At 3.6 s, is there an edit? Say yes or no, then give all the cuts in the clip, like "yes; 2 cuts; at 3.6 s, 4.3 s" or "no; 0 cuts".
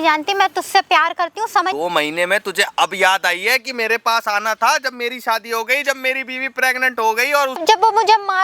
no; 2 cuts; at 1.7 s, 7.6 s